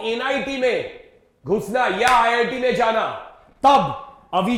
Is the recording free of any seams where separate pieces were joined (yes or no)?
yes